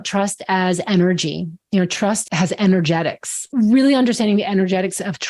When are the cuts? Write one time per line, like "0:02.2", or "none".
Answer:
0:02.2
0:03.4